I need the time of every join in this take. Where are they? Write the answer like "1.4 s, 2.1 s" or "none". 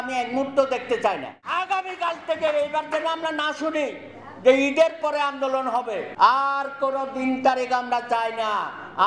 1.6 s, 6.1 s